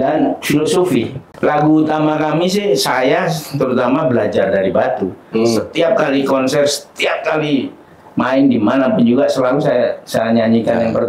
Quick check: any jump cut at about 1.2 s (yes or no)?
yes